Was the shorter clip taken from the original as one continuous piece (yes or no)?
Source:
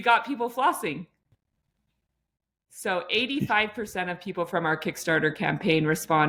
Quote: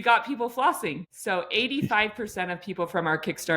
no